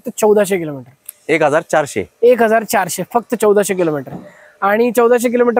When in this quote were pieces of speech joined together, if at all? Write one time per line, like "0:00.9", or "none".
none